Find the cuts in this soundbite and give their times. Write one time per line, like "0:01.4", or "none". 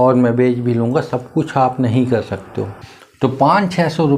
0:02.8